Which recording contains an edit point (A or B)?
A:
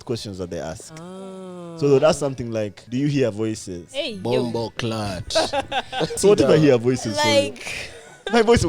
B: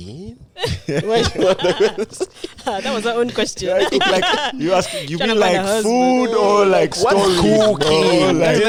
A